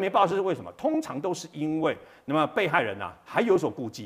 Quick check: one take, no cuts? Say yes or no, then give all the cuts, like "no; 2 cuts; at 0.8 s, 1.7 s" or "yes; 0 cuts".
yes; 0 cuts